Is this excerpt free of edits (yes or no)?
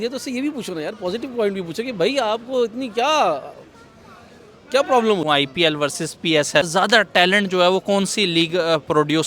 no